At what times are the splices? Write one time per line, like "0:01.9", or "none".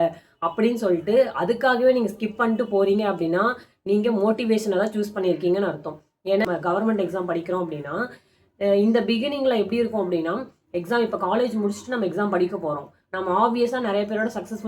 0:06.5